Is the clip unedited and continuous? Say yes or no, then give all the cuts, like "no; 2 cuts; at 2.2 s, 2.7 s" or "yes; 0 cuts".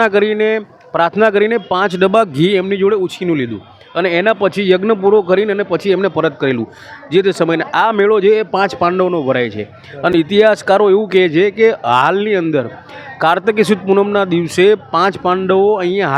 yes; 0 cuts